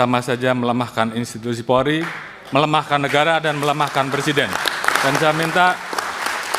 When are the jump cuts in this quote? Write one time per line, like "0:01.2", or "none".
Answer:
0:05.0